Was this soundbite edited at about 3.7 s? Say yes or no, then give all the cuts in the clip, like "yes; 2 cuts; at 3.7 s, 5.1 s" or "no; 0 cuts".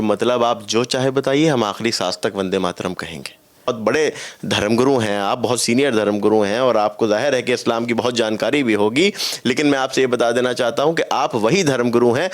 yes; 1 cut; at 3.7 s